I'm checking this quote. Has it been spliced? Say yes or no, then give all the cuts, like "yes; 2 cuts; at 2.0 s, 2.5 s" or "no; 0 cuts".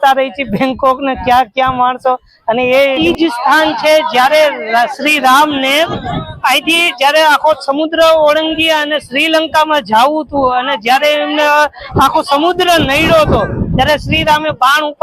yes; 1 cut; at 3.0 s